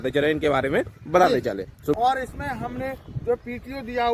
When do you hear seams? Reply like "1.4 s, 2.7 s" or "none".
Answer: 1.9 s